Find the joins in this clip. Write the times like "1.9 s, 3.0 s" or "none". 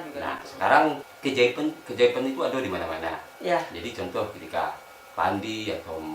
1.1 s